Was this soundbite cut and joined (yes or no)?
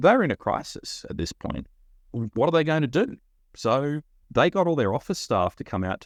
no